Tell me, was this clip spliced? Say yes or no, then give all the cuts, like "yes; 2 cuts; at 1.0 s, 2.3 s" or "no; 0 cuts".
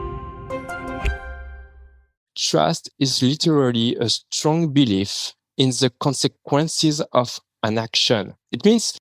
yes; 1 cut; at 2.3 s